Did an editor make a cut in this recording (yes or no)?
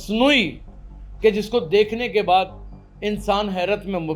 no